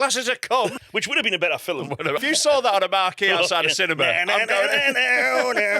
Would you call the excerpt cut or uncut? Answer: cut